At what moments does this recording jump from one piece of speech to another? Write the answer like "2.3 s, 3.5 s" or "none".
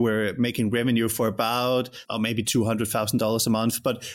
2.0 s